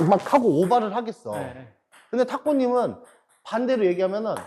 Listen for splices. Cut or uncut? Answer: uncut